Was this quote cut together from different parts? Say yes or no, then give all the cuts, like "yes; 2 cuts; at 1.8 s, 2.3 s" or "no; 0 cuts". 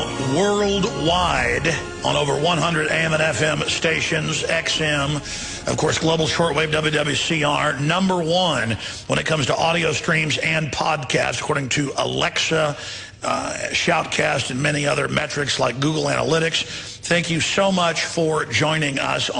yes; 1 cut; at 14.2 s